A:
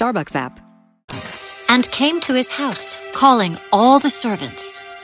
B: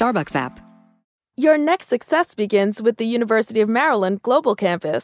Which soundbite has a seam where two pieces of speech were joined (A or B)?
B